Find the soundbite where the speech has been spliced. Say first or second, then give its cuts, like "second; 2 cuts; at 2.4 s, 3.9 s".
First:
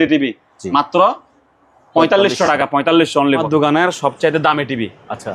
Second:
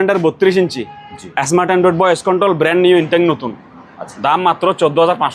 first; 1 cut; at 3.4 s